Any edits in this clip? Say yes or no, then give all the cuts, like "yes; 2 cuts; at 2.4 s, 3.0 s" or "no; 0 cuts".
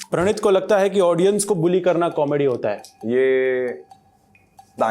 no; 0 cuts